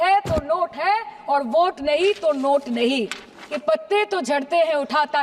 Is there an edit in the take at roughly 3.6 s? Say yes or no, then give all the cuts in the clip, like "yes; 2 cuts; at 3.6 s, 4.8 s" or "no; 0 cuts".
yes; 1 cut; at 3.6 s